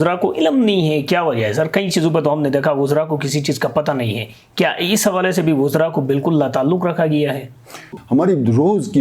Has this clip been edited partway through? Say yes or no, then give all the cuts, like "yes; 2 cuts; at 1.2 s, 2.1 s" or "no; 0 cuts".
yes; 1 cut; at 7.9 s